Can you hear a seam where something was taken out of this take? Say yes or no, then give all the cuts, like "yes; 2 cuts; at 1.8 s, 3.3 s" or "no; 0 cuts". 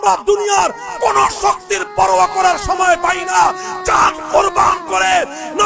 no; 0 cuts